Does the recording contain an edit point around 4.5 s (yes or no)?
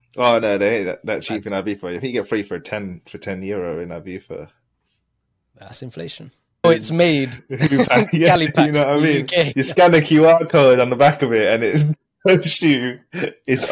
no